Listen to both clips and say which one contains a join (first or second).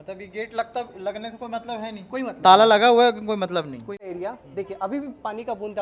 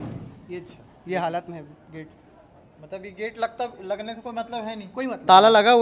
first